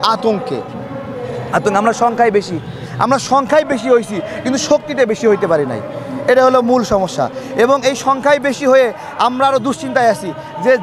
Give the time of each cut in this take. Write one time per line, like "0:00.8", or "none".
none